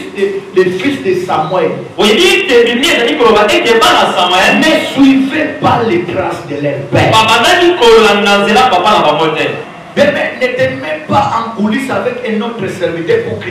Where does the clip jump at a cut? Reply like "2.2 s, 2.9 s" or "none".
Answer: 9.7 s